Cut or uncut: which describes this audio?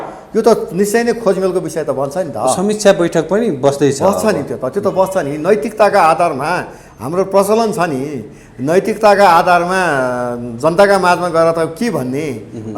uncut